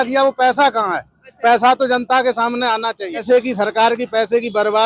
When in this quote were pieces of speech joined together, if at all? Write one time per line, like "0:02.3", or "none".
0:03.2